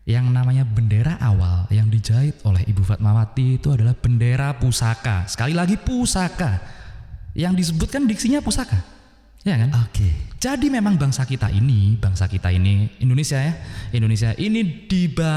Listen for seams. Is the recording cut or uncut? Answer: uncut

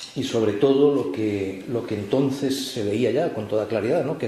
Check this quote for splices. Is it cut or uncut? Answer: uncut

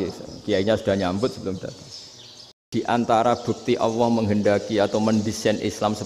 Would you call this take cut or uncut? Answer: cut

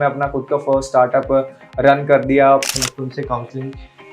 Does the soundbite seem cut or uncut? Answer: cut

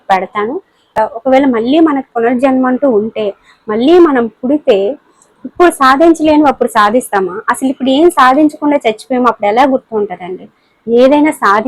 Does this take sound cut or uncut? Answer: cut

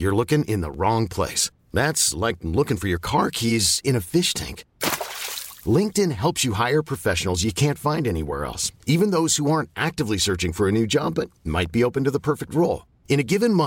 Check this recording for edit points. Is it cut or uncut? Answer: uncut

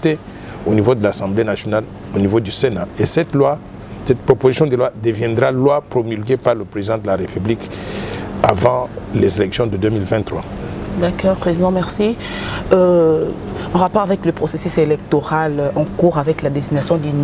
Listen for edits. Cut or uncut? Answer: uncut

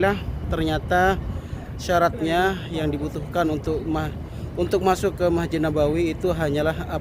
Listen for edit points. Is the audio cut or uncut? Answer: uncut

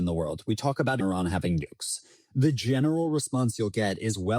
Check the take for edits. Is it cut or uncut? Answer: cut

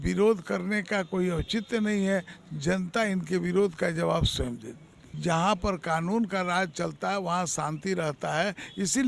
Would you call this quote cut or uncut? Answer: cut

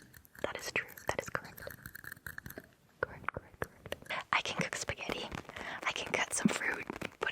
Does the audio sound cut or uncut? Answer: cut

